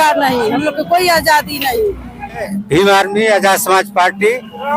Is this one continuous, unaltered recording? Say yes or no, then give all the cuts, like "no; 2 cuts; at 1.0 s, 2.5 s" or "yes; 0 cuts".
no; 1 cut; at 2.5 s